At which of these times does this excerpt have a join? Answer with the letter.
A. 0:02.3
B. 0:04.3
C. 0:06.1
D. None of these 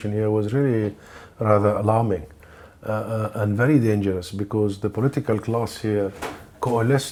D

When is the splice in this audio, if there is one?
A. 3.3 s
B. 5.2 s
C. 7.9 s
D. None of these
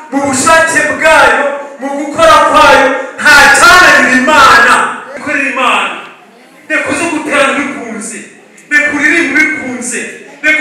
B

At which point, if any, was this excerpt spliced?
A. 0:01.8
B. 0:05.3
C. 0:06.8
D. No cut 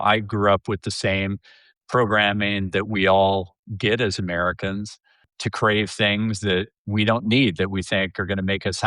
B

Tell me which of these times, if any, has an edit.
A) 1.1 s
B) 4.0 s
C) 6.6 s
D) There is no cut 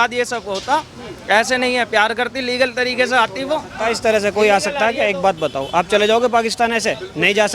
D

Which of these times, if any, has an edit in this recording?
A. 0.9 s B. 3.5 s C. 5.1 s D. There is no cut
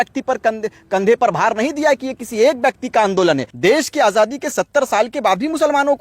B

